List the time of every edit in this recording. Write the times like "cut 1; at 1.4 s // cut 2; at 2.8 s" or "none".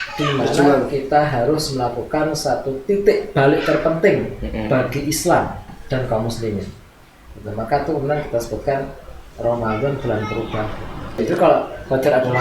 cut 1; at 11.2 s